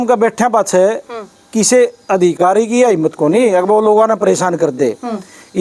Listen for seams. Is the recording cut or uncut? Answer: uncut